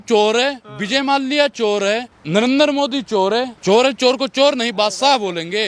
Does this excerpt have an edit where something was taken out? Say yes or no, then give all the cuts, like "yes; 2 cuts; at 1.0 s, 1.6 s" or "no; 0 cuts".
yes; 2 cuts; at 2.1 s, 3.5 s